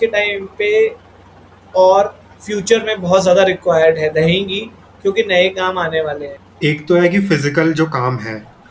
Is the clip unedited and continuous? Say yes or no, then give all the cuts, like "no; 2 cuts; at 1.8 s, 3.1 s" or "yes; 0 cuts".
yes; 0 cuts